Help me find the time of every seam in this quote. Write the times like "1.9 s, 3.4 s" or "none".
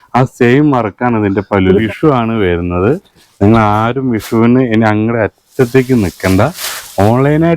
1.9 s